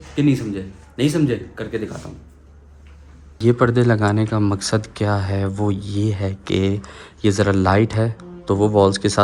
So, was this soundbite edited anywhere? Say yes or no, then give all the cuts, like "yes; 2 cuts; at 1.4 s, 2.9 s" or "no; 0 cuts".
no; 0 cuts